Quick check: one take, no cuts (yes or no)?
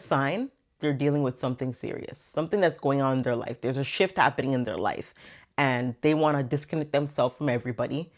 yes